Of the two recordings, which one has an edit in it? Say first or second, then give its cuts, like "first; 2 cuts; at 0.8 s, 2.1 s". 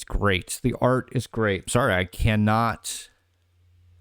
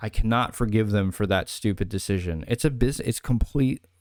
first; 1 cut; at 1.7 s